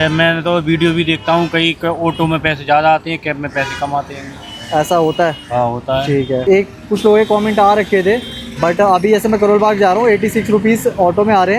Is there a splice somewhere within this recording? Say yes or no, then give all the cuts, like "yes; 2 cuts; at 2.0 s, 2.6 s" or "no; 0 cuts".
no; 0 cuts